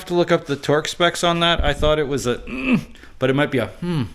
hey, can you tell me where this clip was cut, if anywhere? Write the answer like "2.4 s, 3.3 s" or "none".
none